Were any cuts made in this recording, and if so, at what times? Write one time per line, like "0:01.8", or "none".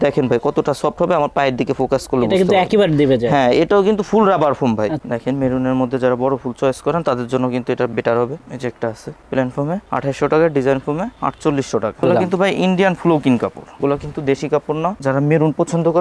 0:05.0
0:08.4
0:12.0
0:15.0